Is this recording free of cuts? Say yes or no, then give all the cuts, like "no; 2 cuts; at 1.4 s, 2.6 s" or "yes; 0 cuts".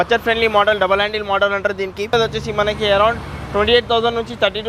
no; 1 cut; at 2.1 s